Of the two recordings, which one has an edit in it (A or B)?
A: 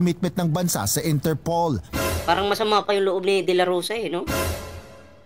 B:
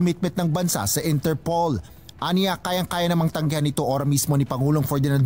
B